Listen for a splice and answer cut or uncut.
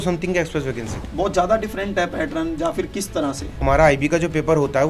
cut